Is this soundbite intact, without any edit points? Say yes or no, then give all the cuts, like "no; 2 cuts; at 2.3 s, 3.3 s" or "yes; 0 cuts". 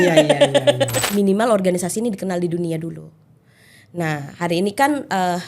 no; 1 cut; at 1.0 s